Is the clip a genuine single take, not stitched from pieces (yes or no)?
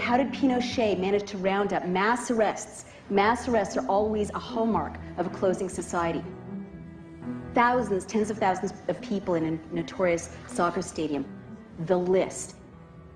no